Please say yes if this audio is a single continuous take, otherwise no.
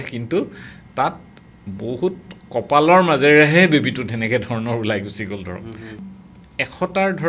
no